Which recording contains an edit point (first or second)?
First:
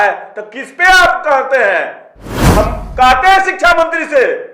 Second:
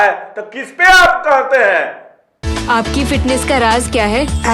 first